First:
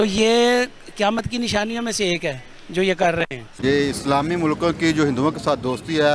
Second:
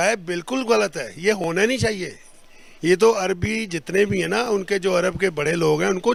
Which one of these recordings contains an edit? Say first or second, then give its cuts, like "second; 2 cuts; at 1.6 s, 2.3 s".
first; 1 cut; at 3.4 s